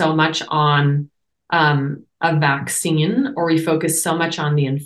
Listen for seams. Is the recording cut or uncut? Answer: uncut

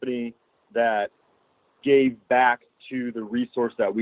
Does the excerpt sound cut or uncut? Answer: uncut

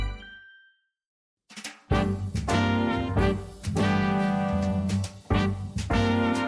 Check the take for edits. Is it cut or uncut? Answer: cut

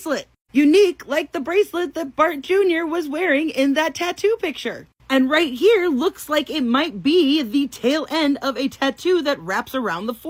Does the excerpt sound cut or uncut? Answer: uncut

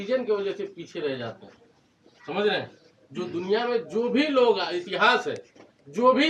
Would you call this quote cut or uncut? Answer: uncut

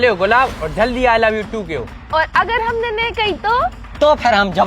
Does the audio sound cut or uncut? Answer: cut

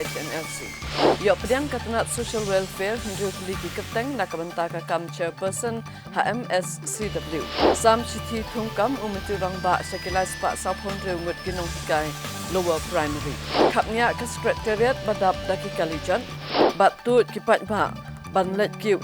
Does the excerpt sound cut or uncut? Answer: cut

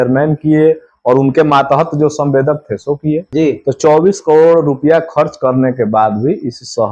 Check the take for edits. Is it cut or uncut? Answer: cut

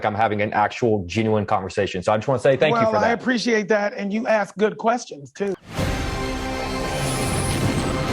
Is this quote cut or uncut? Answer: cut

